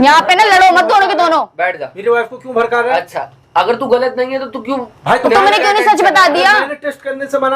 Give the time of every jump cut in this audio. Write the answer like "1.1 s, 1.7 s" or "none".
none